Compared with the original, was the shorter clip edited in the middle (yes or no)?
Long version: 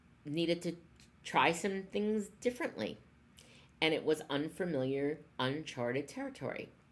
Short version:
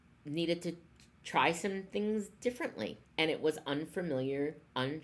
yes